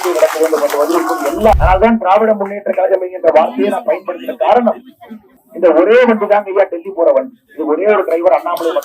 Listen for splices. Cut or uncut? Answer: cut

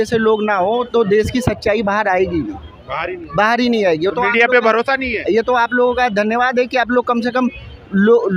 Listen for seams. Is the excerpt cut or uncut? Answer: uncut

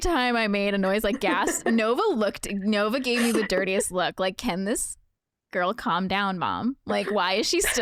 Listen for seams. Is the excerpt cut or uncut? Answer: uncut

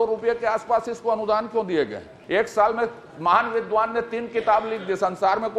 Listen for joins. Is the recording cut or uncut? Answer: cut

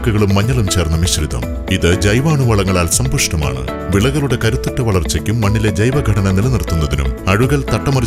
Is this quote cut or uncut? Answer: uncut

